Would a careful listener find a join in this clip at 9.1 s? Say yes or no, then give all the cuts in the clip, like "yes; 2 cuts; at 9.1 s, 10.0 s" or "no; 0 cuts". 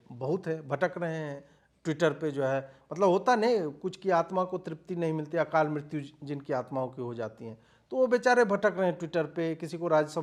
no; 0 cuts